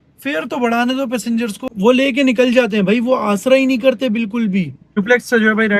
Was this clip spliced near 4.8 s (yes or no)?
yes